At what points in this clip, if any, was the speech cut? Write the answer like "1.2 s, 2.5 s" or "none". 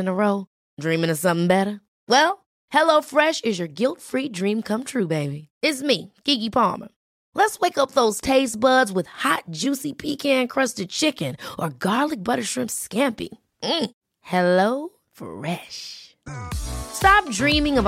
none